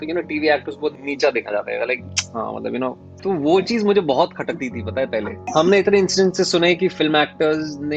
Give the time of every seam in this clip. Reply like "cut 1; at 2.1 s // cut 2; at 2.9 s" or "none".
cut 1; at 1.0 s // cut 2; at 3.1 s // cut 3; at 5.4 s

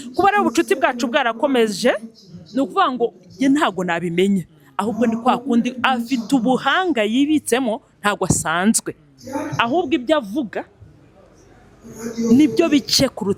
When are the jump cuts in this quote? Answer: none

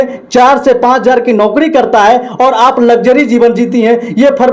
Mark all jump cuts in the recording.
none

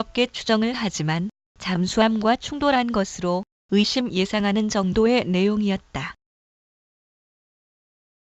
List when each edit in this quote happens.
cut 1; at 3.6 s

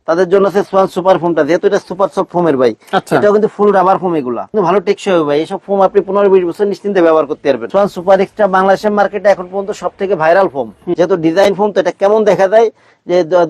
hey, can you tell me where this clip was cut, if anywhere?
cut 1; at 4.5 s // cut 2; at 7.7 s // cut 3; at 10.9 s

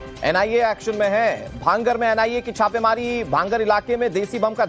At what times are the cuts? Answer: cut 1; at 2.9 s

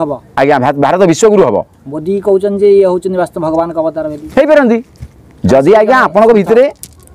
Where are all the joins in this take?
none

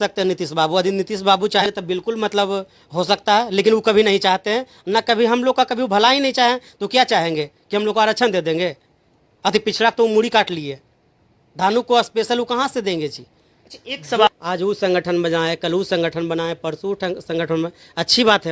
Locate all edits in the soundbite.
cut 1; at 1.6 s // cut 2; at 14.3 s

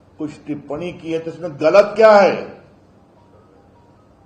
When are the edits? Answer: none

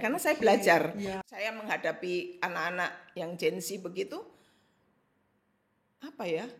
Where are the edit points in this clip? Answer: cut 1; at 1.1 s

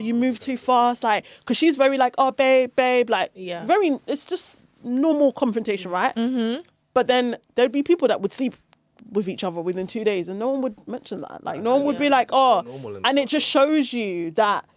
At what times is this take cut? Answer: none

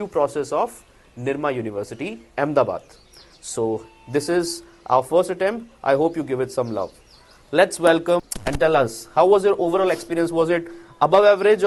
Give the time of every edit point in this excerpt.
none

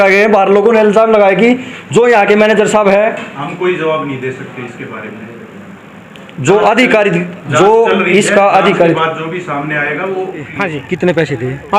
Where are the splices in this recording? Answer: cut 1; at 10.5 s

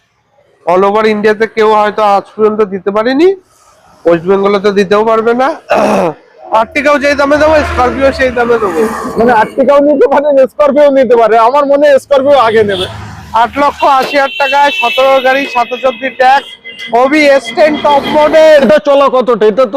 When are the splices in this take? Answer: cut 1; at 6.3 s // cut 2; at 18.6 s

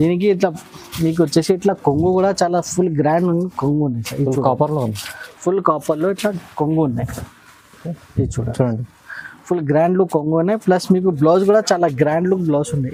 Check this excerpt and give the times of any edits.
none

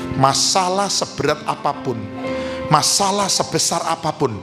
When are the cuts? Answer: none

